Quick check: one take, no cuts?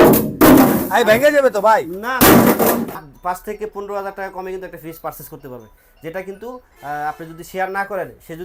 no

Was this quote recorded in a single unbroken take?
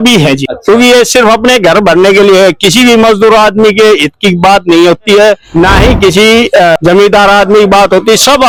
yes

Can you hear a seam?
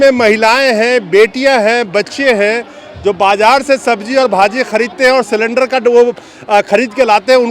no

